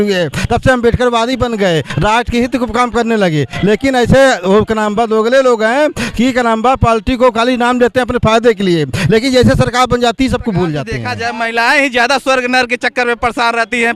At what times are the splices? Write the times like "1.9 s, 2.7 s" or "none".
11.0 s